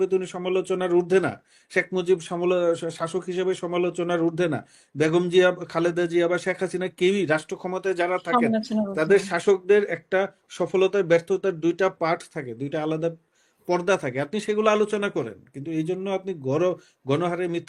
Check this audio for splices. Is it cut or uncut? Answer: uncut